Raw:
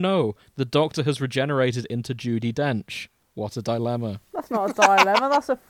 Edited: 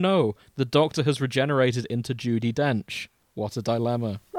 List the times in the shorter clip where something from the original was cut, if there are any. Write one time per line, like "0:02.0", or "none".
none